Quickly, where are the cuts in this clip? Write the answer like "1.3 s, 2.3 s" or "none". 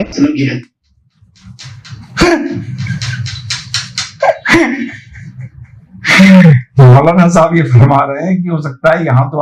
none